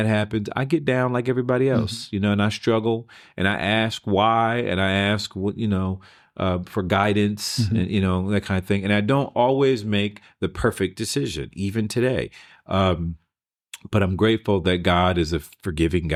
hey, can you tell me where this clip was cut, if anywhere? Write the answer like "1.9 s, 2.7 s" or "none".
none